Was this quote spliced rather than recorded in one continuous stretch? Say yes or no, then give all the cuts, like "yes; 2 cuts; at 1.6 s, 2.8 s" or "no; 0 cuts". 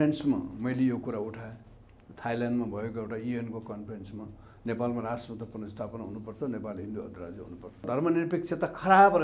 yes; 1 cut; at 7.9 s